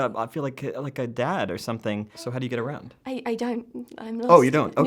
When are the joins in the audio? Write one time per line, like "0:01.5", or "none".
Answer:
0:02.3